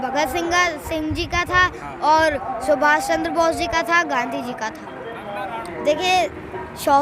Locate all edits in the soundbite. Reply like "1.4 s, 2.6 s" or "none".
5.7 s